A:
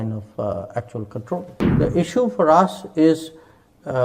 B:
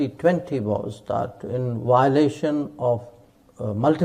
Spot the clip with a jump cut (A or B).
A